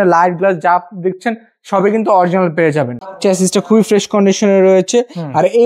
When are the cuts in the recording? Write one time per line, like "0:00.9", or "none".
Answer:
0:03.0